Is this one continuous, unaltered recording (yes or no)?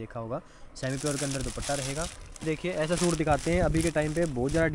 no